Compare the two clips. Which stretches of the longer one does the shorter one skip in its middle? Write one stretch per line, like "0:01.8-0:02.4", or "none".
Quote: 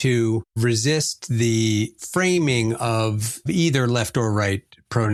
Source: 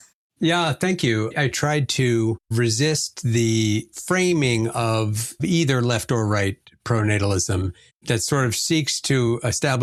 none